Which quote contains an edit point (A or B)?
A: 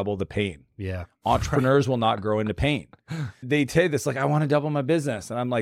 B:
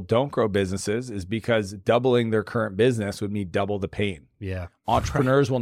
A